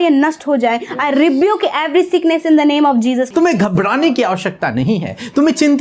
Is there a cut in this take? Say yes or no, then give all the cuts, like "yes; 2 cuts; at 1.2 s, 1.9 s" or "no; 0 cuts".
yes; 1 cut; at 3.3 s